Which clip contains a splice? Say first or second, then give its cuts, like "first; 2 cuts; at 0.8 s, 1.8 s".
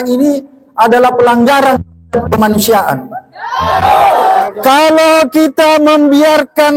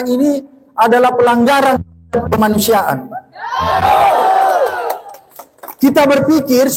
first; 1 cut; at 4.4 s